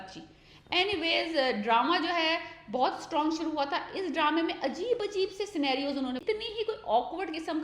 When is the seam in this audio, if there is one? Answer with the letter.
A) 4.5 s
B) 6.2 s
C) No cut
B